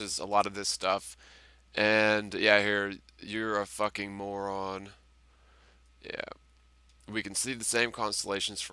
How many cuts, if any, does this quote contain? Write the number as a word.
zero